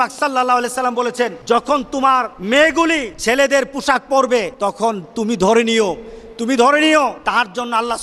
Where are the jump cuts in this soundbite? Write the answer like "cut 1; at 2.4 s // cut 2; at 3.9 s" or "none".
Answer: cut 1; at 1.4 s // cut 2; at 2.3 s // cut 3; at 3.1 s // cut 4; at 4.5 s // cut 5; at 7.2 s